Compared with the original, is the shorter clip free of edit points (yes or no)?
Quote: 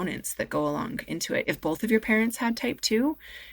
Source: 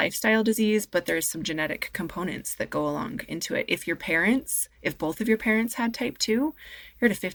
no